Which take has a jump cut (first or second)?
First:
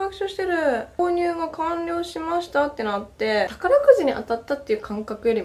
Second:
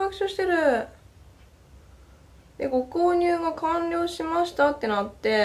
first